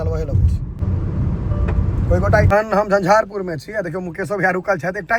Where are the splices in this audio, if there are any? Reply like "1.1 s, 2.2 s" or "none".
0.8 s, 2.5 s